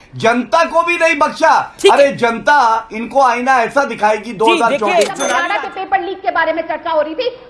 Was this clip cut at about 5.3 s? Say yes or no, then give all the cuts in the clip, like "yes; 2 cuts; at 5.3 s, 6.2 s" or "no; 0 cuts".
yes; 1 cut; at 5.3 s